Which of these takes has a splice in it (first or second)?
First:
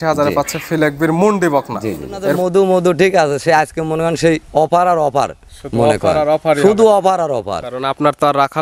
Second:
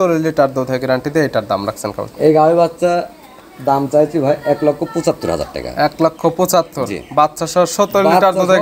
first